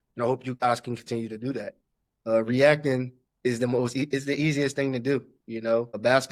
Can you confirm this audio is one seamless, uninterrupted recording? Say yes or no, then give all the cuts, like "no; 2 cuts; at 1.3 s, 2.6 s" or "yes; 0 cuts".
yes; 0 cuts